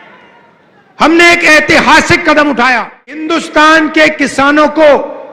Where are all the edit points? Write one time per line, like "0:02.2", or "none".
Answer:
0:03.3